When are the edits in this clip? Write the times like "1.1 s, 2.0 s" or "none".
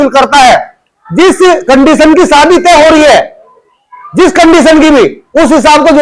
none